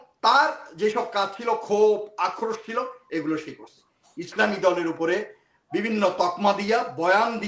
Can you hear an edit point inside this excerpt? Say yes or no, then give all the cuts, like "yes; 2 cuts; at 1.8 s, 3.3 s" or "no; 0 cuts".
no; 0 cuts